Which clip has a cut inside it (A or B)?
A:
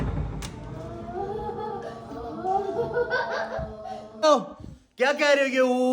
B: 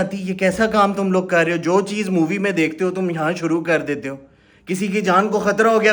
A